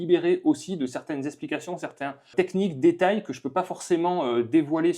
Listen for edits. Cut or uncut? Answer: cut